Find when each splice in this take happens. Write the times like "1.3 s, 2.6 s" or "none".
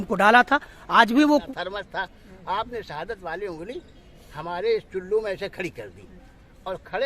1.5 s